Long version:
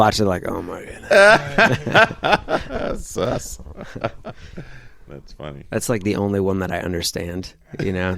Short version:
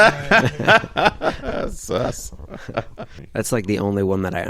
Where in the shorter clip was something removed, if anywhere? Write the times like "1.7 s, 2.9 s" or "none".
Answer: 3.2 s